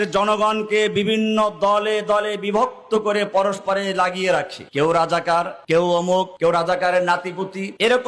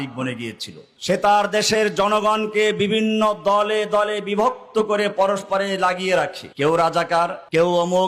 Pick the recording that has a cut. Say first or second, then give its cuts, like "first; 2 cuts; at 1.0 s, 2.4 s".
second; 1 cut; at 0.9 s